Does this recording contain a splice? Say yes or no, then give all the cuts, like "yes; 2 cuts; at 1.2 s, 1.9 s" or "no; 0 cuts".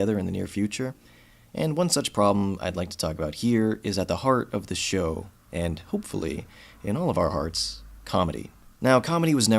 yes; 1 cut; at 6.2 s